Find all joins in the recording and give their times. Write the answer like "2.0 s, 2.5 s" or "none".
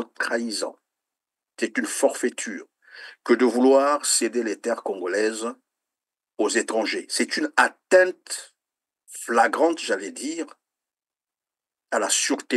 none